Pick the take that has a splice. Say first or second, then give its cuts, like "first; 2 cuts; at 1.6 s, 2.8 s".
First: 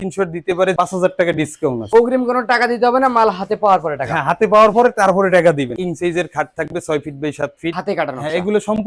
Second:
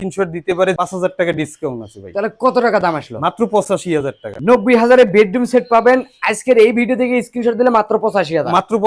first; 3 cuts; at 1.8 s, 5.8 s, 7.7 s